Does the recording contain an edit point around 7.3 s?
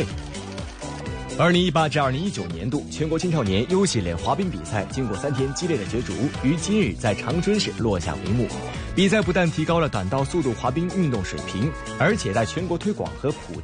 no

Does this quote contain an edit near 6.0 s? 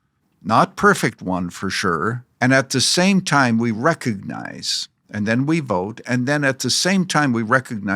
no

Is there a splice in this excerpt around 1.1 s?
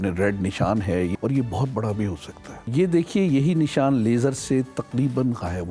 yes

